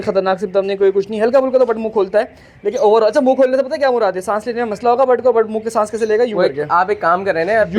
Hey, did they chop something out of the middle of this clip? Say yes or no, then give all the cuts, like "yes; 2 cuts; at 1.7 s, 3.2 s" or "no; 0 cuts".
no; 0 cuts